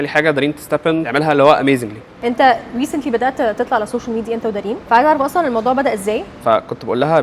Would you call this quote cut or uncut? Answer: cut